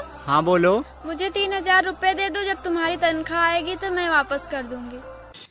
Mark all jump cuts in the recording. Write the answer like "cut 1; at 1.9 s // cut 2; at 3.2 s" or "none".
cut 1; at 0.9 s